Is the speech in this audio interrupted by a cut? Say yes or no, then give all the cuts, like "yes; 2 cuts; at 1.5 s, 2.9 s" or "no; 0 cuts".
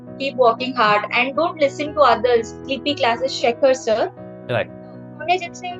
yes; 1 cut; at 2.7 s